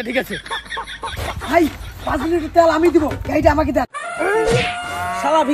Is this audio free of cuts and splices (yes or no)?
yes